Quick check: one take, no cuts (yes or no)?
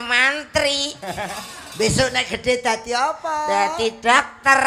yes